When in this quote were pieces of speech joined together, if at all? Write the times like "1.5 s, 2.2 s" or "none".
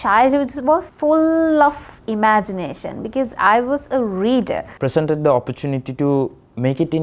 0.9 s, 4.7 s